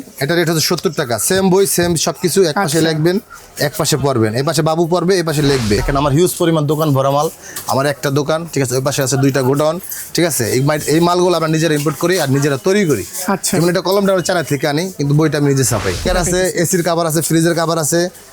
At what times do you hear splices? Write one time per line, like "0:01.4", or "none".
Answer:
0:05.8
0:16.1